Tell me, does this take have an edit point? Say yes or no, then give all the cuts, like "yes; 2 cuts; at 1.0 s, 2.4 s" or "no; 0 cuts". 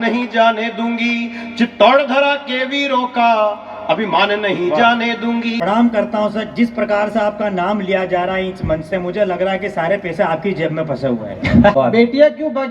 yes; 2 cuts; at 5.6 s, 11.7 s